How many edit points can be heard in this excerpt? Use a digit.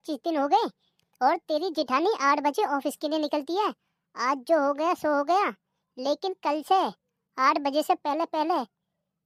0